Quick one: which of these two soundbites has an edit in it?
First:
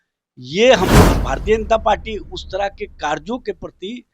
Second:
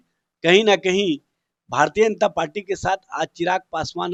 first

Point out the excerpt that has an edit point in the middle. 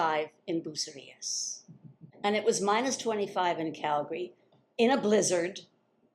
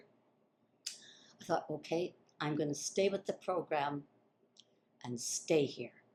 first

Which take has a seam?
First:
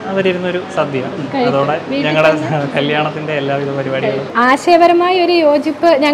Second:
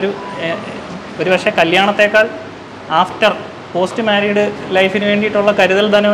first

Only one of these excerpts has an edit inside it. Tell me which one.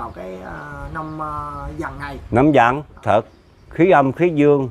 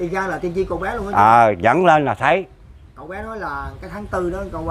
first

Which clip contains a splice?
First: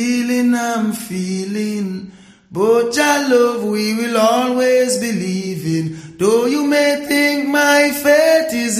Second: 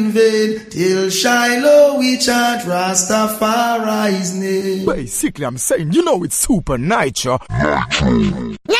second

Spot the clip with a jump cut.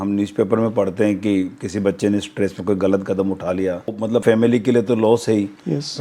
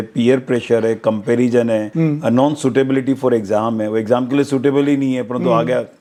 first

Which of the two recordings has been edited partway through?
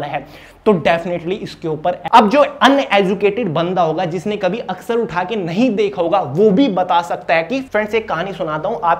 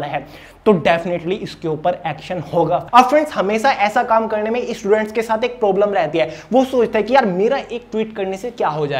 first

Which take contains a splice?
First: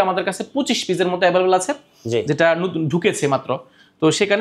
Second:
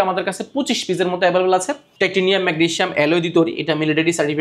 second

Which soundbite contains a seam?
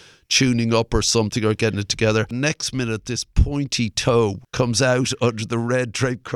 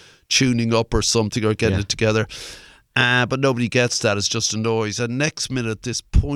first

